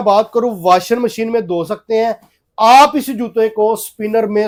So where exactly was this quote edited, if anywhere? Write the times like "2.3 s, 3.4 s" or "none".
none